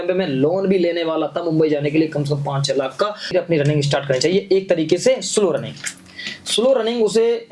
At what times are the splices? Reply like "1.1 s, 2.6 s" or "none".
3.3 s